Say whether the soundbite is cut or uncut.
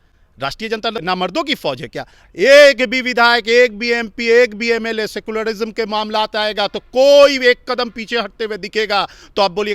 cut